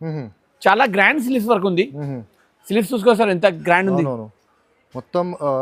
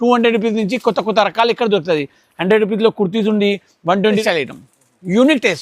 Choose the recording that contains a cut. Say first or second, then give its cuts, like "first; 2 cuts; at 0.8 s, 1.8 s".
second; 1 cut; at 4.2 s